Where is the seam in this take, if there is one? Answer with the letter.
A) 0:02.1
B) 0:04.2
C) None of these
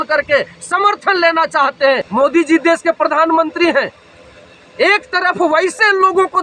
A